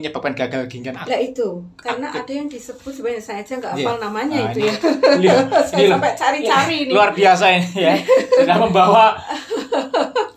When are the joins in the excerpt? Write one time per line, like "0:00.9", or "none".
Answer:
none